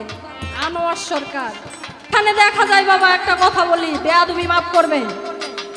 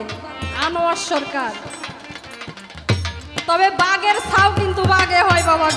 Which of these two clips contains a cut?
first; 1 cut; at 2.1 s

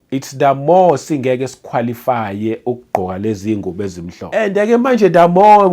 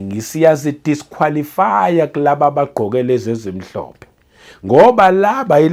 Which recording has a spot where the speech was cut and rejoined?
first; 1 cut; at 4.4 s

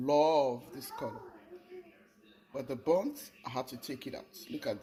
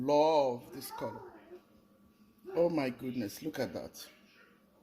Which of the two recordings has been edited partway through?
second; 1 cut; at 1.6 s

